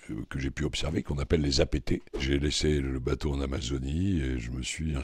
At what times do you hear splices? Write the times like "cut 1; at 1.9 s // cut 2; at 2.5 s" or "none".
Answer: cut 1; at 2.2 s